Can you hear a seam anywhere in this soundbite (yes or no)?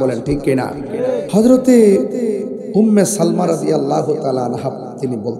yes